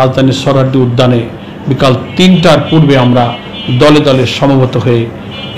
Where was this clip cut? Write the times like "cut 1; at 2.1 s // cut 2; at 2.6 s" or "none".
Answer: none